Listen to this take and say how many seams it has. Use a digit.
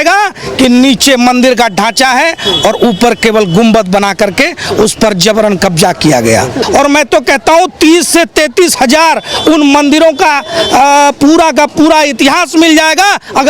1